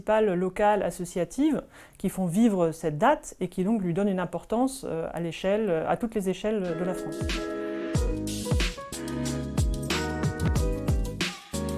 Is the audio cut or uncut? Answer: cut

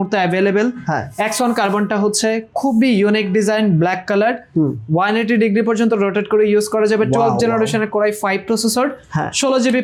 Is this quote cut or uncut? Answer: uncut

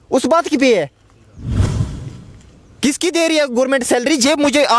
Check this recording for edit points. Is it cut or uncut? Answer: uncut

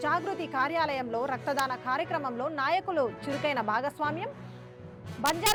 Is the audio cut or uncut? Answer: uncut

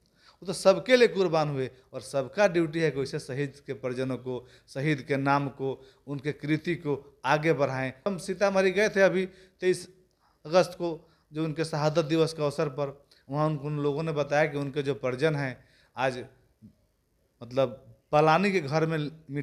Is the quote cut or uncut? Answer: cut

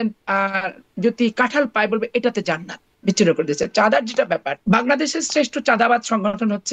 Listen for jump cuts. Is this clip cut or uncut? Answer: cut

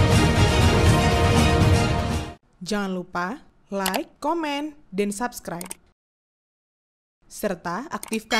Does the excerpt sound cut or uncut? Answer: cut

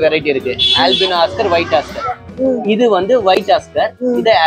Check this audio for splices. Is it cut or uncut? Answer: uncut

